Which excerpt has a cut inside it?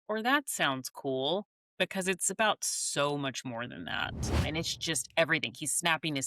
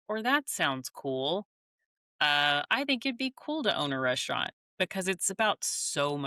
first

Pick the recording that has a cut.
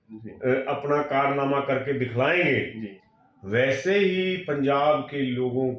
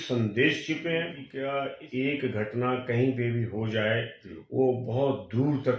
second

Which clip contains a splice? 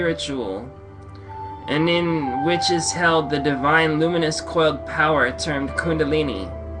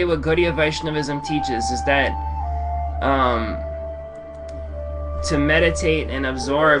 first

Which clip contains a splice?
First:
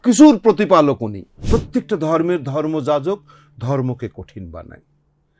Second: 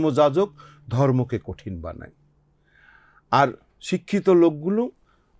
first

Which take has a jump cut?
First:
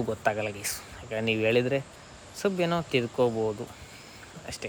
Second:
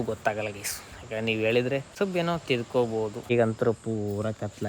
second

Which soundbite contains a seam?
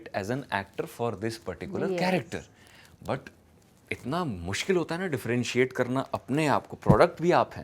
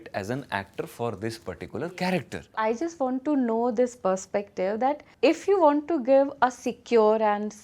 second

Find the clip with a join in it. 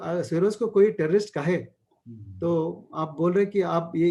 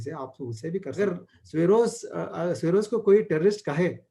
second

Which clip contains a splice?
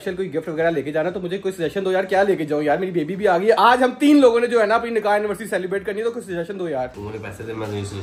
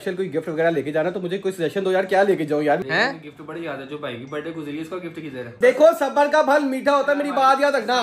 second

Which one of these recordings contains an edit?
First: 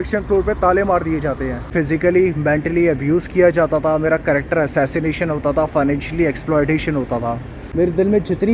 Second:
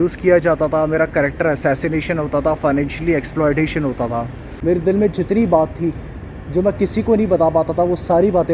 first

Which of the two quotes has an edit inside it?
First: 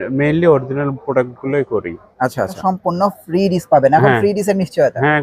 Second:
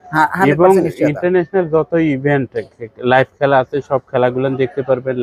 first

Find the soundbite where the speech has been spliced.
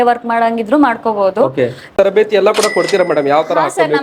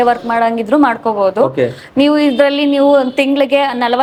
first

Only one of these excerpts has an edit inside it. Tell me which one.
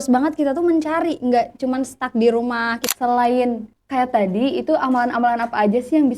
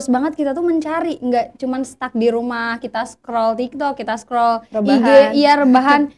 first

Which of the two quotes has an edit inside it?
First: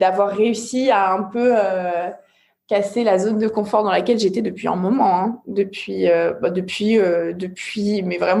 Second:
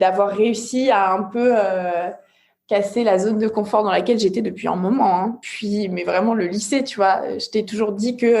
second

